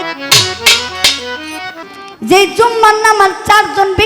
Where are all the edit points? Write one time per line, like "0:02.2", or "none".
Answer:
0:01.8

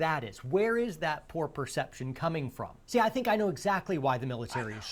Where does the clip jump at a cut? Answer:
none

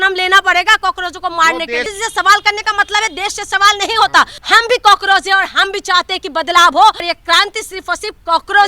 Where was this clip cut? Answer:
0:01.9
0:04.4
0:07.0

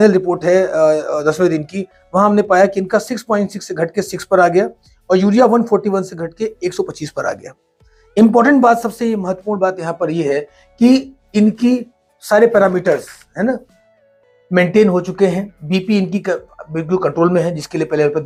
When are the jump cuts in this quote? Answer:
none

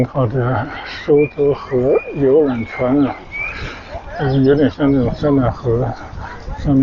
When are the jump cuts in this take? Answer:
none

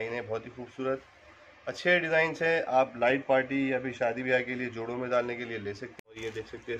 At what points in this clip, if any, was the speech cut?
0:05.9

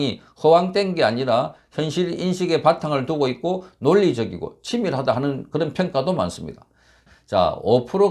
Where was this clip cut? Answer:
0:07.1

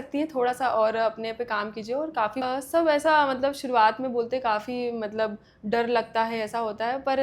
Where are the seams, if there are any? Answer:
0:02.4

